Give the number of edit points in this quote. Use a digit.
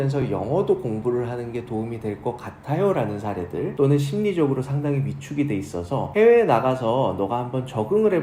1